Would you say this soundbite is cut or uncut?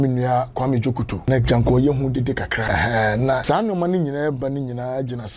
cut